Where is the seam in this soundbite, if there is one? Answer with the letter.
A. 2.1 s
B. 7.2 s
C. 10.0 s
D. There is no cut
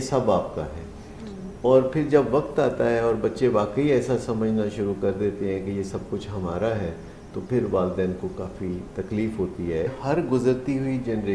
C